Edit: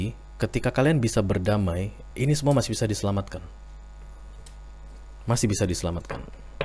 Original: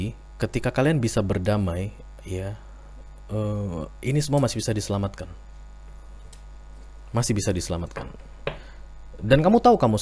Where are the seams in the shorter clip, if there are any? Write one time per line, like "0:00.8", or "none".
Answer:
0:02.0